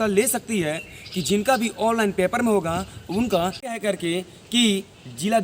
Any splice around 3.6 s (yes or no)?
yes